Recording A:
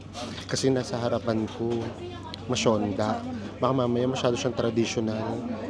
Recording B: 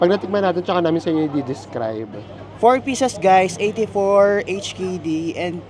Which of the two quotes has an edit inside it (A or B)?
B